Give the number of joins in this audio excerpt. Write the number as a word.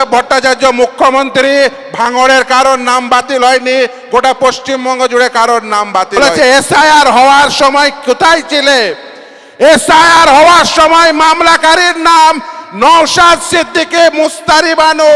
one